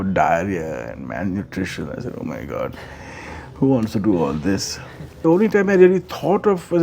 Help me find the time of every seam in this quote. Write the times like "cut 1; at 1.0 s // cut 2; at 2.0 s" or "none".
cut 1; at 5.1 s